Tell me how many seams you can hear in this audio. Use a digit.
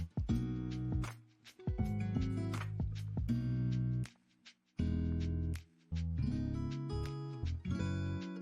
0